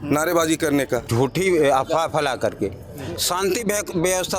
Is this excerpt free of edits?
no; 1 cut; at 1.1 s

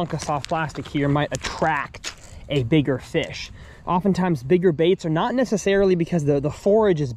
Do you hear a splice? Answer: no; 0 cuts

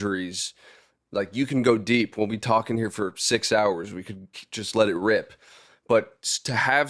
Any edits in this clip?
no; 0 cuts

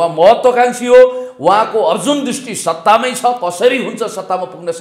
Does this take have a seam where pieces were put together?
no; 0 cuts

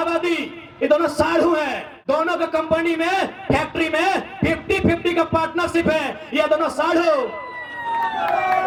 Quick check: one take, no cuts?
yes; 0 cuts

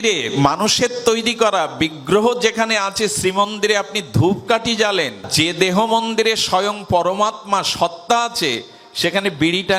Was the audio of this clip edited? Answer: no; 0 cuts

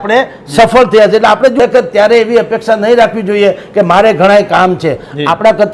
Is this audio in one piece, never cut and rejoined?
no; 1 cut; at 1.6 s

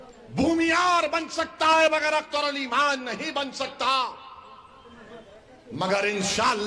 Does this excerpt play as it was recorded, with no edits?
yes; 0 cuts

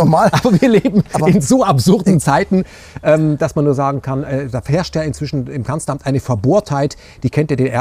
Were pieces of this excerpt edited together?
no; 0 cuts

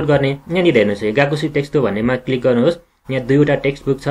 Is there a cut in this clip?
no; 0 cuts

